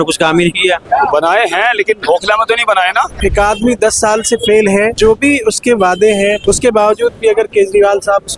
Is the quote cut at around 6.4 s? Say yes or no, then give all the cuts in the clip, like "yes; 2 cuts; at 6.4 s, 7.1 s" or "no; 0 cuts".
yes; 3 cuts; at 3.1 s, 4.9 s, 6.4 s